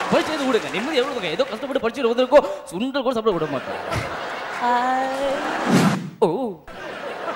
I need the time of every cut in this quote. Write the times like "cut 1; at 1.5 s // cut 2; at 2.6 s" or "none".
cut 1; at 6.0 s